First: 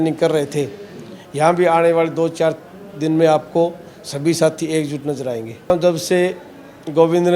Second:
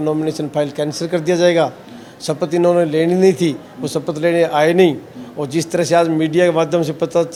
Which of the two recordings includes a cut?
first; 1 cut; at 5.7 s

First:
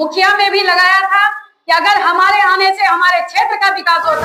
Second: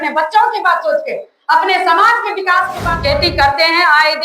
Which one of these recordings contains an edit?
second; 1 cut; at 2.9 s

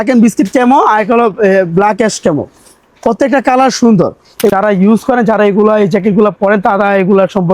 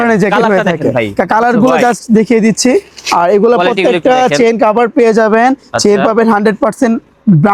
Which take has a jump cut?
first; 1 cut; at 4.5 s

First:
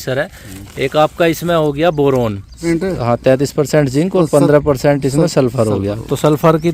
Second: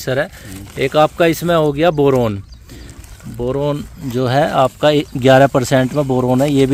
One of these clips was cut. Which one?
first; 1 cut; at 2.6 s

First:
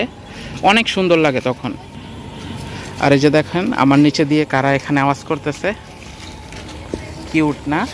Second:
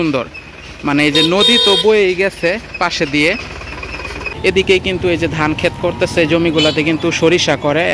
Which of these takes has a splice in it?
second; 1 cut; at 4.2 s

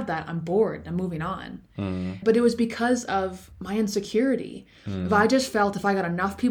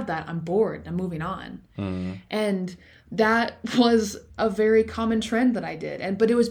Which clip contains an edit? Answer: first; 1 cut; at 2.2 s

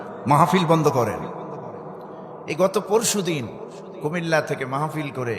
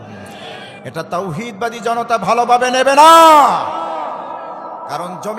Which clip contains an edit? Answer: first; 1 cut; at 2.1 s

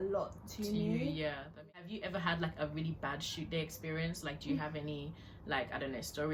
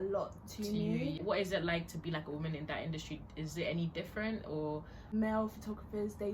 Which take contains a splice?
second; 2 cuts; at 1.2 s, 5.1 s

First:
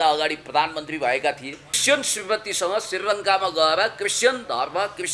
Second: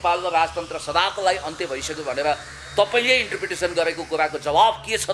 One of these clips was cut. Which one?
first; 1 cut; at 1.8 s

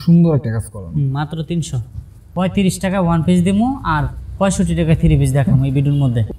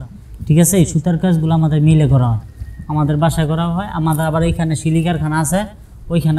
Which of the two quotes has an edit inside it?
first; 1 cut; at 2.3 s

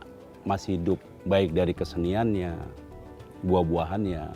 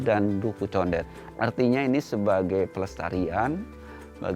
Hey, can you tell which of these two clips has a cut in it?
second; 1 cut; at 1.1 s

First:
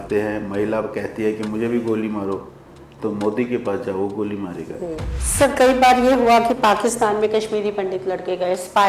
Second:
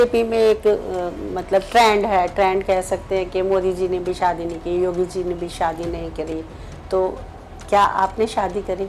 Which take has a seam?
first; 1 cut; at 5.2 s

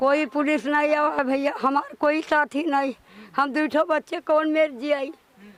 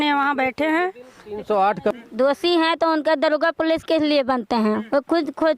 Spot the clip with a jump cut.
second; 1 cut; at 2.0 s

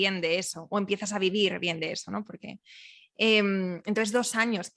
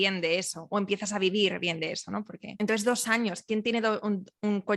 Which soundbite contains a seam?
second; 1 cut; at 2.5 s

